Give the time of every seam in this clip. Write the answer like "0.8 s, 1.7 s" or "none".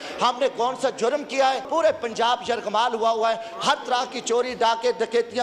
1.7 s

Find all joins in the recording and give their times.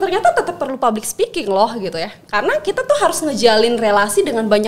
none

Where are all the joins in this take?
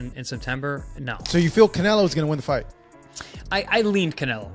1.2 s

